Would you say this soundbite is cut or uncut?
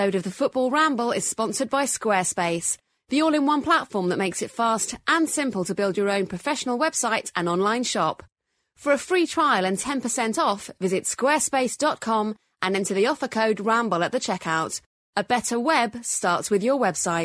uncut